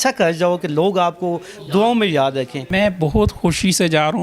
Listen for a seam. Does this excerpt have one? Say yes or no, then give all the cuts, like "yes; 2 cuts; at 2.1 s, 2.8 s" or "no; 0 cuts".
yes; 1 cut; at 2.7 s